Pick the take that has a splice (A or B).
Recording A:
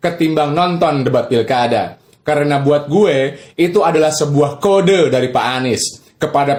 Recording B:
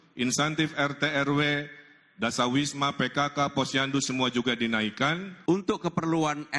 B